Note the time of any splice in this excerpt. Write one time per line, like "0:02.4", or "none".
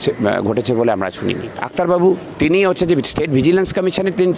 0:01.6